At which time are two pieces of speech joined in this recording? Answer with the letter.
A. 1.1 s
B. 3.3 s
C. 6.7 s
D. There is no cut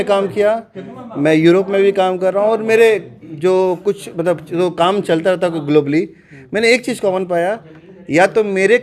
D